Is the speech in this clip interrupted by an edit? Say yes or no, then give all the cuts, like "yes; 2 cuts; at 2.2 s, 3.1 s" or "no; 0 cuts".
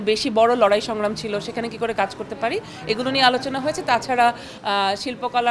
no; 0 cuts